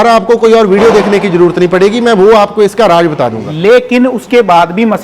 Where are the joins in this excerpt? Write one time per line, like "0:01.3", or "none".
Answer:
0:03.5